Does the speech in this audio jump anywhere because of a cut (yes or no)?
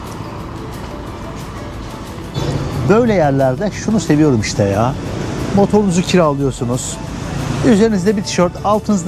yes